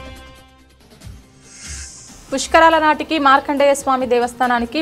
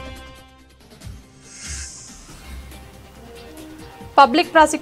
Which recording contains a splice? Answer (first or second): first